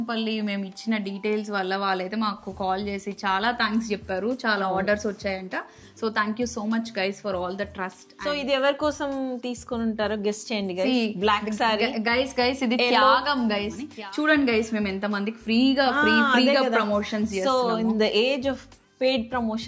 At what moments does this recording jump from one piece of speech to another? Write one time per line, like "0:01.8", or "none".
0:08.1
0:13.8

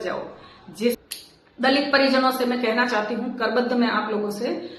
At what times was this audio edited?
0:01.0

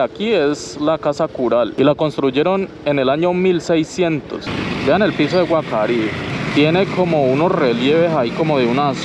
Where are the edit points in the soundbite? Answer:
0:01.7
0:04.5
0:06.3

